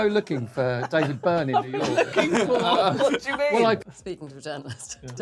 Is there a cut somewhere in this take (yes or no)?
yes